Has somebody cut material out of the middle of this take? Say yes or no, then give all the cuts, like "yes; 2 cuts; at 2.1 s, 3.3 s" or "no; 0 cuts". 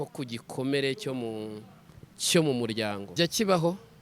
yes; 1 cut; at 3.1 s